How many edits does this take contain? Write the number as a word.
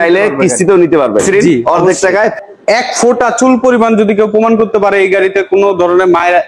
one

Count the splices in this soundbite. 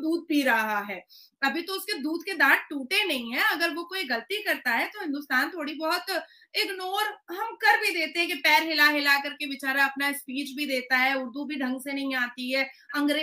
zero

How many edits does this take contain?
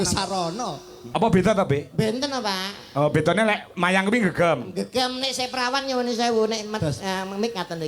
one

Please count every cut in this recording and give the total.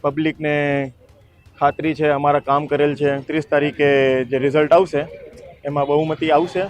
one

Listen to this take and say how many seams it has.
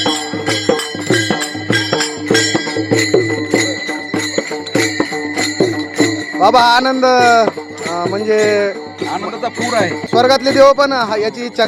zero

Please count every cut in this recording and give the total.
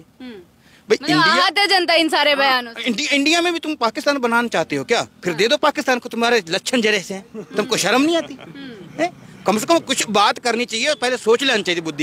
zero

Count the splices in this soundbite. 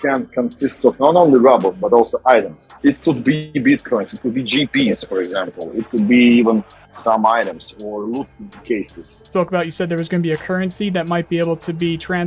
two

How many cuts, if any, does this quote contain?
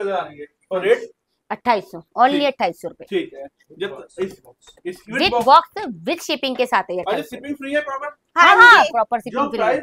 zero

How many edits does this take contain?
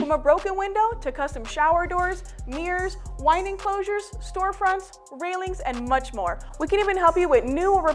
one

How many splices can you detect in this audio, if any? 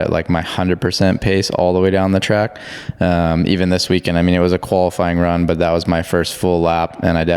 zero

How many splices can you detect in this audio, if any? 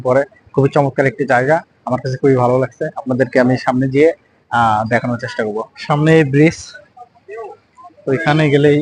zero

